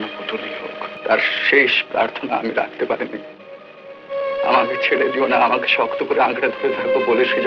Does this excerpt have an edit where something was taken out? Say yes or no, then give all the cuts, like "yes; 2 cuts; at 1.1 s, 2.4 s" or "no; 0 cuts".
yes; 1 cut; at 0.9 s